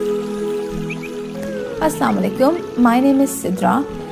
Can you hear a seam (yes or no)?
yes